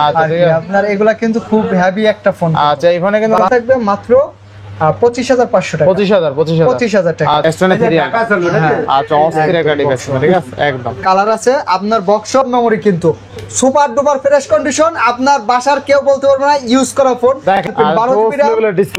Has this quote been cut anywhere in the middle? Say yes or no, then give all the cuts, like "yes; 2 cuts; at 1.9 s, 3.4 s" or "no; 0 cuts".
yes; 4 cuts; at 3.4 s, 7.4 s, 12.3 s, 17.7 s